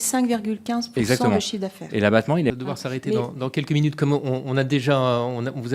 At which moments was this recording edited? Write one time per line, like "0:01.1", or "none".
0:02.5